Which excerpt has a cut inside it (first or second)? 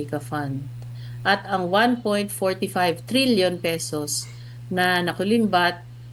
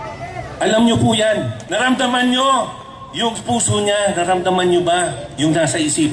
second